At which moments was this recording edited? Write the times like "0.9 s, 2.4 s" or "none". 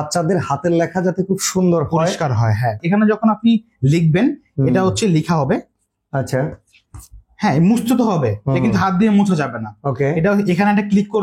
2.8 s